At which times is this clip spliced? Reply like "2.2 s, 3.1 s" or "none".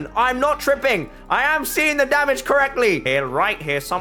3.0 s